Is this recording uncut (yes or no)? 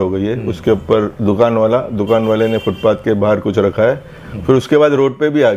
yes